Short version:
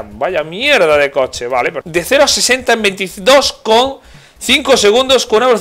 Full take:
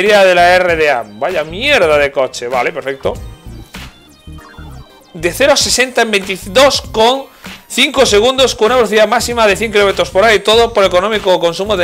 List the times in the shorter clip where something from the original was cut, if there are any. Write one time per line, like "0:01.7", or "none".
0:01.8